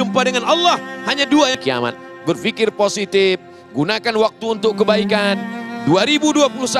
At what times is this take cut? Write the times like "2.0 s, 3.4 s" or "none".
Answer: 1.6 s